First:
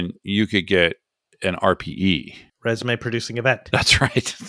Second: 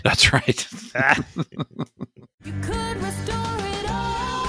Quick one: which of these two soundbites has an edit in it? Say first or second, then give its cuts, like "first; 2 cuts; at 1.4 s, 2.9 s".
second; 1 cut; at 2.5 s